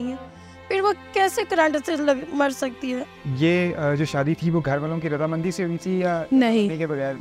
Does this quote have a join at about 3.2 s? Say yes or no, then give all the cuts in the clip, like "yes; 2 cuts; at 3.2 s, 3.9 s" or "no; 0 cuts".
yes; 1 cut; at 3.2 s